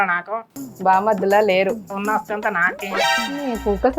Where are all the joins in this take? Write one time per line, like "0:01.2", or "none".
0:01.9
0:03.1